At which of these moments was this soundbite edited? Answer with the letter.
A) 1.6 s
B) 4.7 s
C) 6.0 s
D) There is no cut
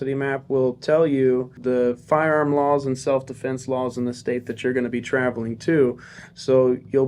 A